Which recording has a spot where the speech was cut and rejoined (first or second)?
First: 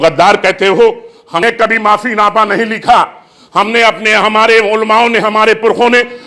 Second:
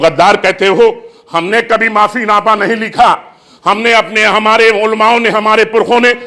first